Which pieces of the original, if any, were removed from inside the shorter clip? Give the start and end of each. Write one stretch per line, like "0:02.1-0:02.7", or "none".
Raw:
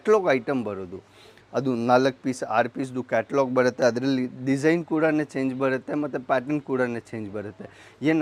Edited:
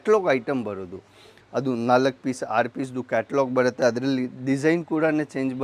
none